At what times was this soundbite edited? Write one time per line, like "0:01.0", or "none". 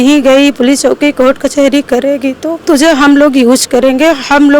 0:02.6